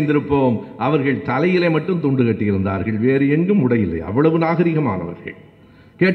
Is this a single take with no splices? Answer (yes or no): yes